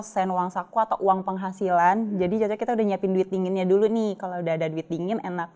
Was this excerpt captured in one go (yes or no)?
yes